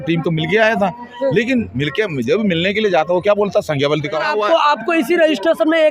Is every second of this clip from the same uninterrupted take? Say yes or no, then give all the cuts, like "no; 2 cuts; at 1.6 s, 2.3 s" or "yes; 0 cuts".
no; 1 cut; at 4.2 s